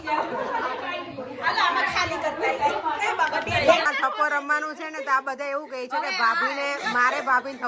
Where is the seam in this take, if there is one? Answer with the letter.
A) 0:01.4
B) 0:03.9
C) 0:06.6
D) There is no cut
B